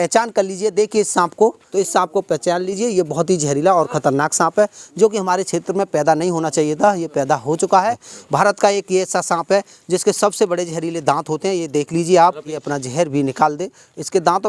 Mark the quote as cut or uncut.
cut